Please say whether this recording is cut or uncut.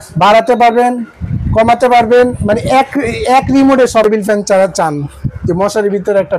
cut